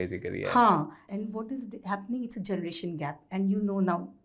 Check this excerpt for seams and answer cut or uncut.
cut